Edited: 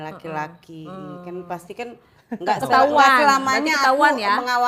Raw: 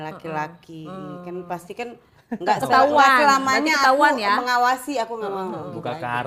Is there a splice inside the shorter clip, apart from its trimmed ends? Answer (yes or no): no